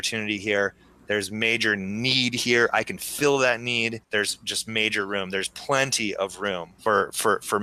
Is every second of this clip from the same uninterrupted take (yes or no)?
yes